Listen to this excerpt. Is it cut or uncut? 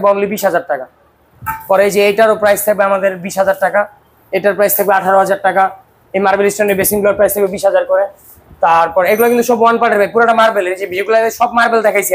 uncut